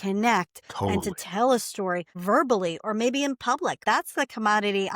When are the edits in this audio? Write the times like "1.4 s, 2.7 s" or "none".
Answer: 3.8 s